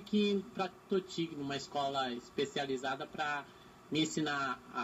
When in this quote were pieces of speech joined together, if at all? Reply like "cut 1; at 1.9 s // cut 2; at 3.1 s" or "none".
none

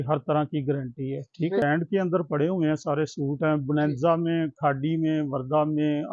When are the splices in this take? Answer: cut 1; at 1.6 s

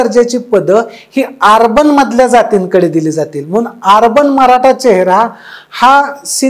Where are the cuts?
none

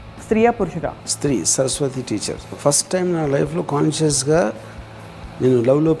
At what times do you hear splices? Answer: cut 1; at 1.1 s // cut 2; at 2.5 s

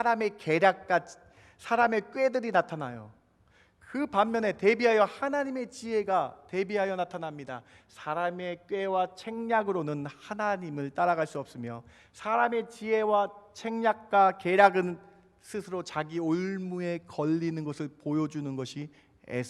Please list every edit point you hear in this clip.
none

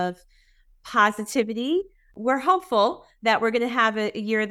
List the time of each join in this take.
cut 1; at 2.1 s

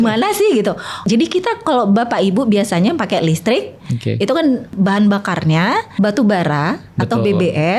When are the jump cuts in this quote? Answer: cut 1; at 1.0 s // cut 2; at 4.7 s // cut 3; at 5.9 s

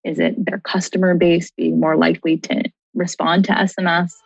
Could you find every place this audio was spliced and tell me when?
cut 1; at 2.8 s

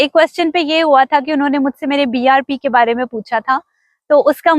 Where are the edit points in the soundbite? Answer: none

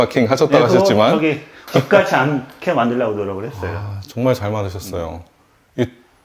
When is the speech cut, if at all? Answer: cut 1; at 1.5 s

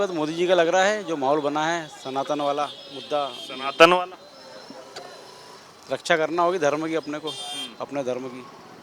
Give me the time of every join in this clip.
none

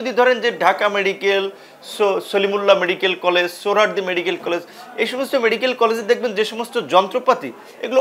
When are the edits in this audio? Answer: none

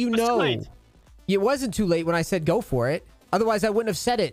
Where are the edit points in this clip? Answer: cut 1; at 3.1 s

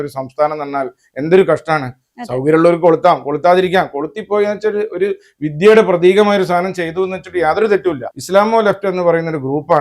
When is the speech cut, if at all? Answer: cut 1; at 8.1 s

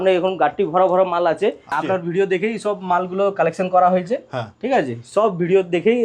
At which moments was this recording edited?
cut 1; at 1.8 s

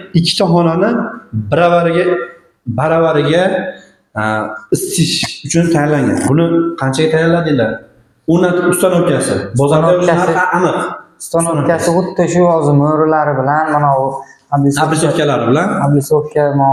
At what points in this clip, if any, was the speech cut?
none

